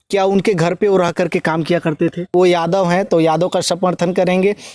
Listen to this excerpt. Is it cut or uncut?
cut